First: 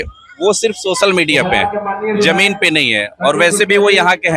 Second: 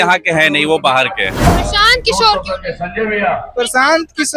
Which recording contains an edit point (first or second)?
second